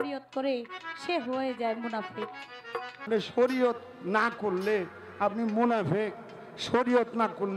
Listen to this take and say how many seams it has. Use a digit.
1